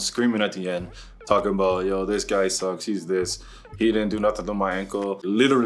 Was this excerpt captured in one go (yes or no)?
yes